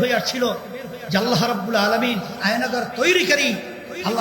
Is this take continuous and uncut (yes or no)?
no